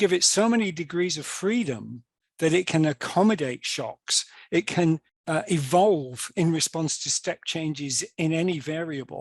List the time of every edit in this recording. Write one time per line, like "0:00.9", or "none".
0:05.1